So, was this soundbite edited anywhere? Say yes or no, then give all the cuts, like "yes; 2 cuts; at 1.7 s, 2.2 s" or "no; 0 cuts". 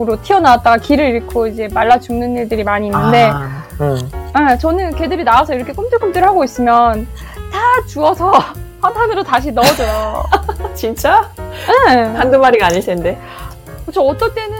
no; 0 cuts